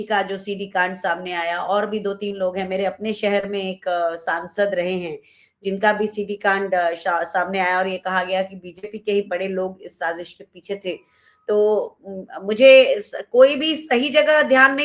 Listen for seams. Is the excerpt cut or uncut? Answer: uncut